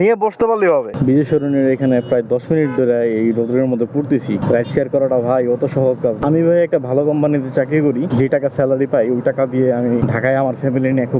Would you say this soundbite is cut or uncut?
cut